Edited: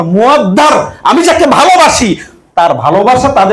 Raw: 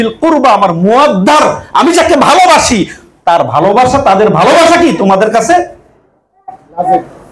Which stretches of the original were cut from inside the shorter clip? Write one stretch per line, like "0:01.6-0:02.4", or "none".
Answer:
none